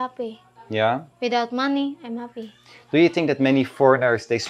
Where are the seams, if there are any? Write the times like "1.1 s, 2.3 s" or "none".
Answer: none